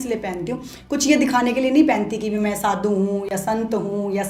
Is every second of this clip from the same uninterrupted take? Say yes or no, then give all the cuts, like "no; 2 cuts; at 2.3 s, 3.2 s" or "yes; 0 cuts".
yes; 0 cuts